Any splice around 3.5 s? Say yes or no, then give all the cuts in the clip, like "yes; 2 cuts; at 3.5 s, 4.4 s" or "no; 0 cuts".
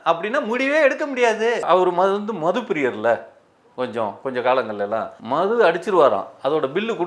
no; 2 cuts; at 1.6 s, 5.1 s